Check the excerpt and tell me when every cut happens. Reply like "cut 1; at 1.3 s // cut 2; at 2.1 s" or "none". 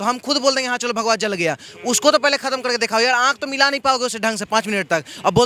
none